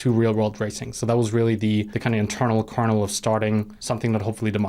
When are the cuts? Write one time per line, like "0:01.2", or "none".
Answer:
0:01.9
0:03.8